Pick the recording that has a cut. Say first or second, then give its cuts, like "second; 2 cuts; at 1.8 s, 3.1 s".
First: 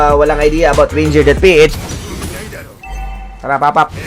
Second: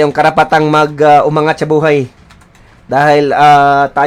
first; 1 cut; at 1.7 s